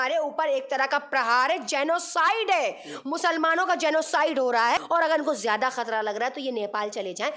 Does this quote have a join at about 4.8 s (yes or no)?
yes